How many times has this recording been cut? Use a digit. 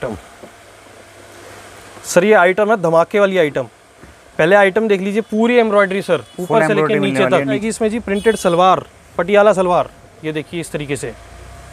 1